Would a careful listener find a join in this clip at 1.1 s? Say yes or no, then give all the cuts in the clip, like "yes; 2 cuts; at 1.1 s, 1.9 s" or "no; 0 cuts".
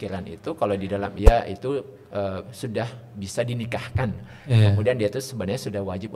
yes; 1 cut; at 1.1 s